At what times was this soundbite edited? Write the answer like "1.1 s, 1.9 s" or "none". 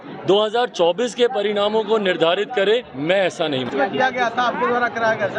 3.7 s